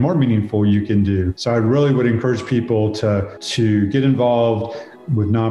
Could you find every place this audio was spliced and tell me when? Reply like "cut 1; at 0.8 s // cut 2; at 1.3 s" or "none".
none